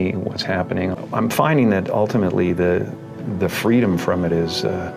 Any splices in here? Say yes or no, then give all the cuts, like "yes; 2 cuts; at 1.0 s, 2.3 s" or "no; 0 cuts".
no; 0 cuts